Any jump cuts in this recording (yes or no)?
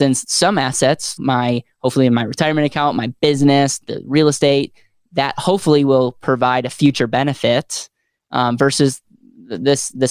yes